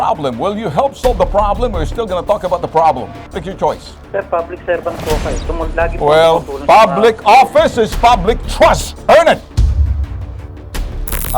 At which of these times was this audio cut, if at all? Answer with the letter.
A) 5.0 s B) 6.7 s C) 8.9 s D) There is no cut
D